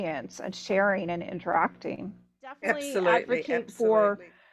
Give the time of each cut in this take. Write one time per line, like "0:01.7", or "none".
0:03.3

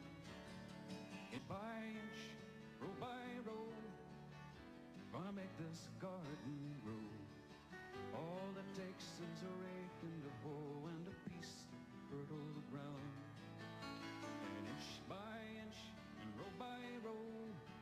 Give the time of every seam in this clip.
0:03.3

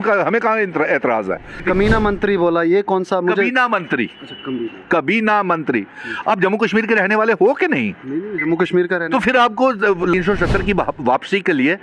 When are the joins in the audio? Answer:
0:01.6
0:10.1

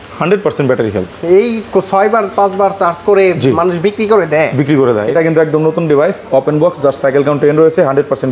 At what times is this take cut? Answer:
0:05.0

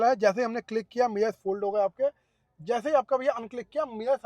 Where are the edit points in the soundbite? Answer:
none

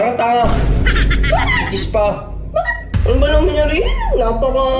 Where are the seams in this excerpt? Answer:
0:02.9

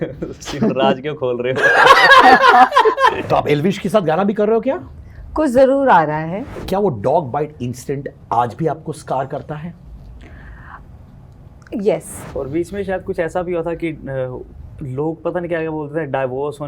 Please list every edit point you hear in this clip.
0:03.2
0:06.5
0:12.2

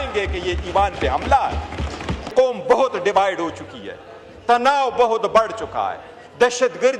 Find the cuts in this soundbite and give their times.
0:02.3

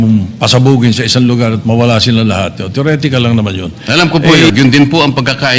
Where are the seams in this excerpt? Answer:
0:04.5

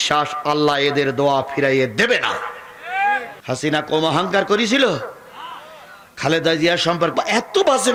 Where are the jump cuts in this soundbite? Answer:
none

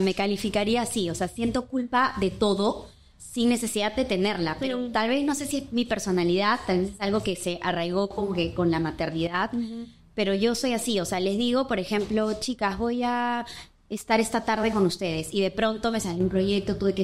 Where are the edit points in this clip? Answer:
none

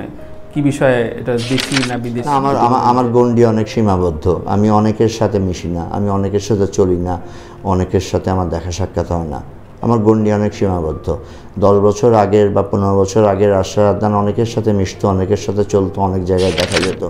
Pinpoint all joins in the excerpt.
0:02.2

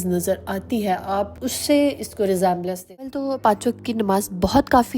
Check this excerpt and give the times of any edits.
0:03.2

